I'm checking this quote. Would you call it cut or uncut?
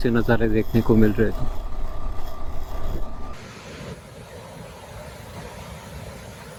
uncut